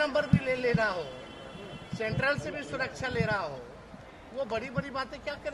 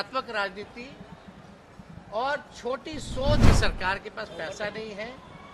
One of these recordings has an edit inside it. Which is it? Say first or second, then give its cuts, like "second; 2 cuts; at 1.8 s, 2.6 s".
second; 1 cut; at 3.4 s